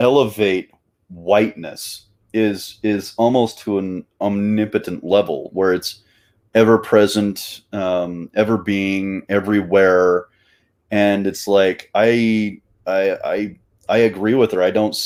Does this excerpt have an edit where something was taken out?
no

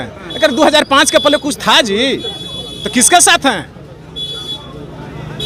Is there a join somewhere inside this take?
no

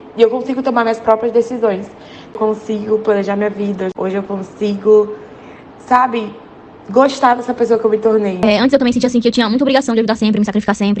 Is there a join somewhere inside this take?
yes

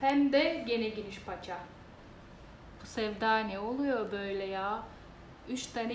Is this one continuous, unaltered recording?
yes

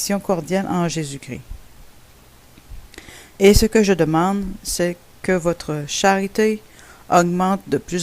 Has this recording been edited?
yes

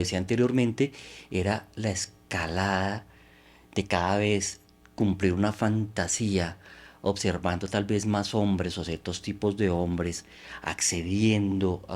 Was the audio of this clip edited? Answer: no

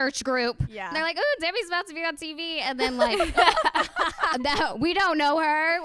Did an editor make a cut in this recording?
yes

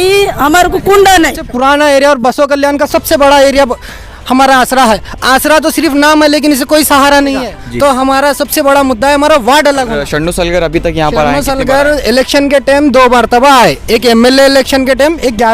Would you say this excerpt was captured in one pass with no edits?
no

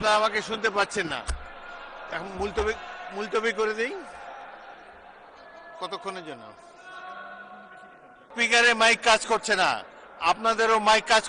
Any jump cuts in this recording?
yes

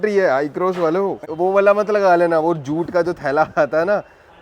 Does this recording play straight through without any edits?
no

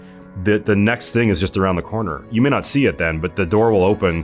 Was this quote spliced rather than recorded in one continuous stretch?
no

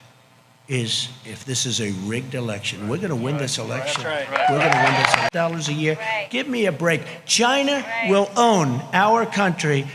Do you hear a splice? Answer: yes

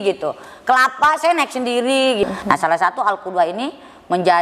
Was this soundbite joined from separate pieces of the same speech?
yes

